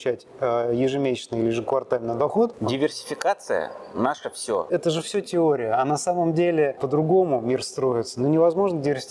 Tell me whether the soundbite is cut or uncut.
cut